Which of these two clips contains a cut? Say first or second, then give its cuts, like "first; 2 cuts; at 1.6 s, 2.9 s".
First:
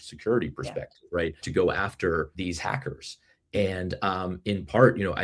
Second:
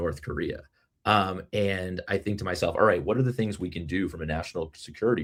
first; 2 cuts; at 1.4 s, 2.3 s